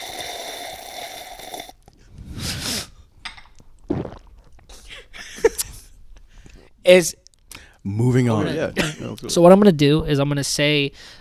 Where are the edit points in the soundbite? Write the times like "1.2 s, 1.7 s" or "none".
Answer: 8.5 s